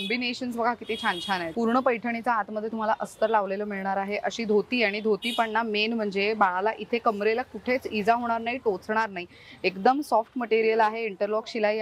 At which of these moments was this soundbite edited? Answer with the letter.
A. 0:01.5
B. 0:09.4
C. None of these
A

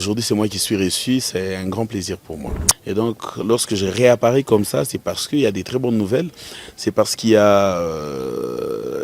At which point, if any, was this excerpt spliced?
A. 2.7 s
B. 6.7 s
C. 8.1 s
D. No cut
A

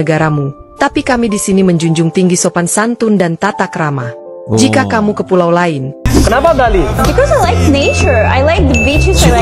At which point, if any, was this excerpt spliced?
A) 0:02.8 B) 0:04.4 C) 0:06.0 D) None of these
C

